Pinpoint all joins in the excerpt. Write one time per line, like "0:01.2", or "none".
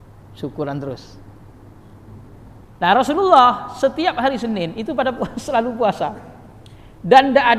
0:02.7